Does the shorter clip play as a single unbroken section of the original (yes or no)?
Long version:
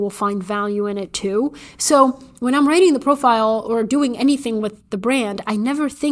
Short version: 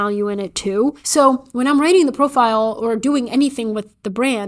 no